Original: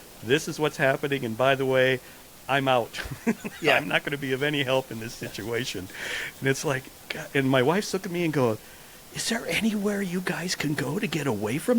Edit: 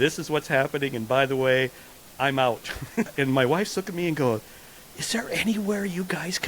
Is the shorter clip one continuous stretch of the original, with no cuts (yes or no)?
no